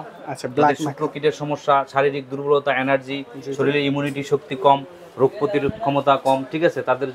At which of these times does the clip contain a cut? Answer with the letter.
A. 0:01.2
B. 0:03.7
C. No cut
C